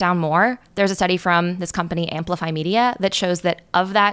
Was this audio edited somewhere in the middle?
no; 0 cuts

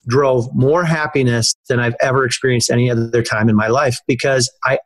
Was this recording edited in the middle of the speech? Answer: no; 0 cuts

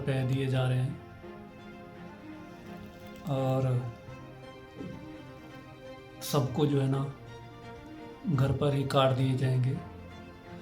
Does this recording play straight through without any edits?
no; 2 cuts; at 1.2 s, 3.2 s

